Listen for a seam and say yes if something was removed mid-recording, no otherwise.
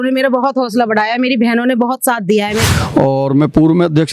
yes